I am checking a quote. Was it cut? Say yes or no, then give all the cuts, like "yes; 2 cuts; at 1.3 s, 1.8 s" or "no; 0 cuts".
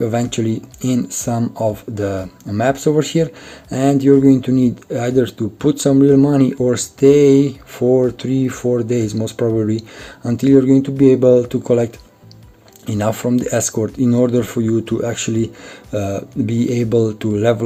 no; 0 cuts